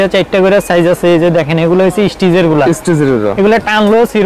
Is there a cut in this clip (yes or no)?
no